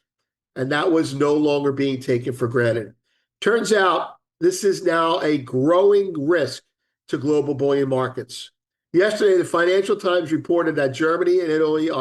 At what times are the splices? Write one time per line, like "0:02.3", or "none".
0:08.7